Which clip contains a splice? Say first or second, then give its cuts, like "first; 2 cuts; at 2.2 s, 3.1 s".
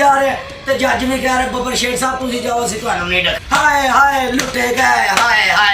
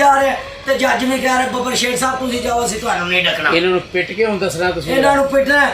first; 1 cut; at 3.4 s